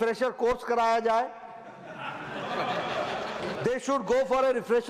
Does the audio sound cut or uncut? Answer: cut